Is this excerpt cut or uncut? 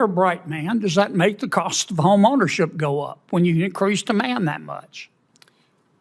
uncut